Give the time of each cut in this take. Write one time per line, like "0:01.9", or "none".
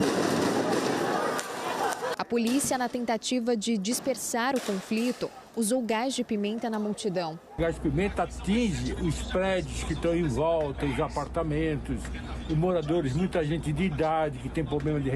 0:02.2
0:07.4